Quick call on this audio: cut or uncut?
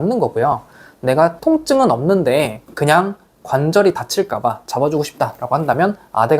cut